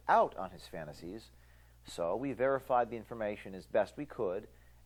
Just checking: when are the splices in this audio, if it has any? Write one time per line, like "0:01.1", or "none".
none